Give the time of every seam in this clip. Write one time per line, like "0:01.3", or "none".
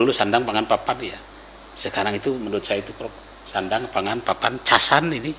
none